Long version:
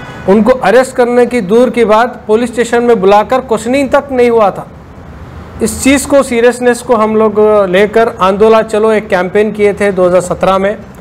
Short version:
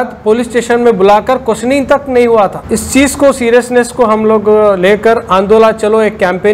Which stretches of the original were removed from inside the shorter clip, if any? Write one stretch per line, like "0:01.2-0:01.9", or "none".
0:04.6-0:05.5